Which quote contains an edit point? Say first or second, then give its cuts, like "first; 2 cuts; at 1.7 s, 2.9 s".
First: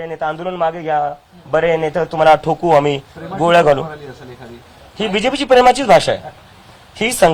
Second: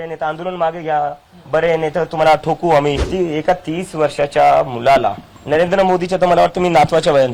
second; 1 cut; at 3.1 s